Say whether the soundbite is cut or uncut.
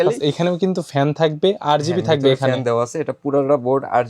uncut